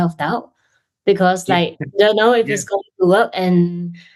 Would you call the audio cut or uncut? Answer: uncut